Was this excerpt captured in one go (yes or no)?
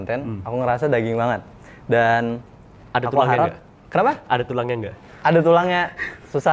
yes